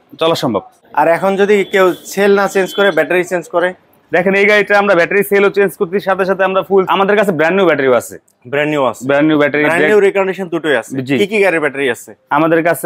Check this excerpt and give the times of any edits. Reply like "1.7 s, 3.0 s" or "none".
6.9 s